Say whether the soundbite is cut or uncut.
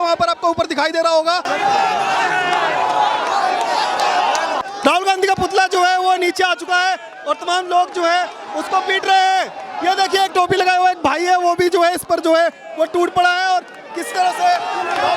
cut